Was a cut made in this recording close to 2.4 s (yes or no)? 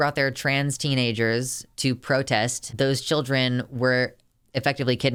no